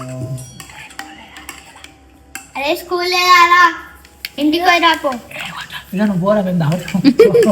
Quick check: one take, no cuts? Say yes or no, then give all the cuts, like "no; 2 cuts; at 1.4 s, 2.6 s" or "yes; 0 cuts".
yes; 0 cuts